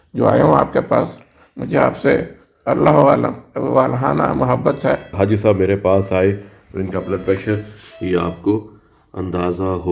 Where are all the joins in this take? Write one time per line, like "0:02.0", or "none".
0:05.1